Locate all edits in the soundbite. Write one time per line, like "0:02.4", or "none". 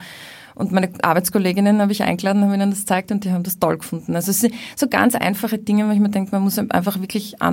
none